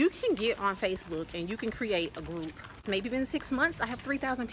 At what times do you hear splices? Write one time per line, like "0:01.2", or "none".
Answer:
0:02.8

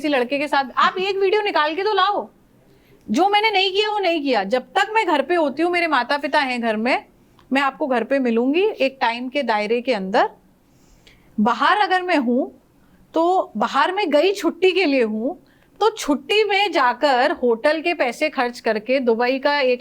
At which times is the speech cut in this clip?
none

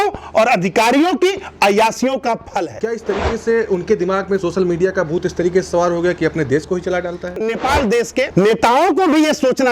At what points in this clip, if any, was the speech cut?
0:02.7
0:07.4

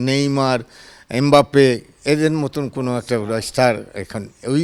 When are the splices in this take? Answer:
none

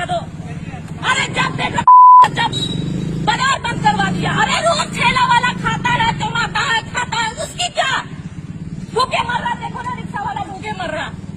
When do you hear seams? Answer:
none

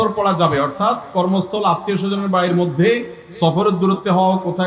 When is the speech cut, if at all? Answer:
none

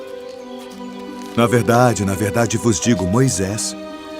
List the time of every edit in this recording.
0:01.2

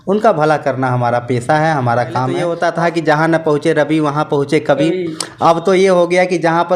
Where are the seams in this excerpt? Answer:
0:02.5

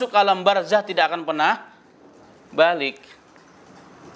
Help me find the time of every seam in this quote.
none

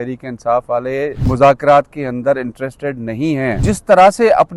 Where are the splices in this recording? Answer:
0:01.2
0:03.6

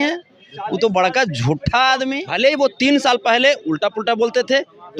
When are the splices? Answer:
0:02.2

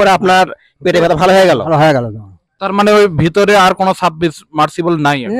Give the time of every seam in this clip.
0:02.6

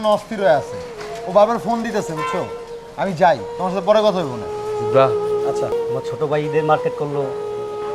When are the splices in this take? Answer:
0:05.7

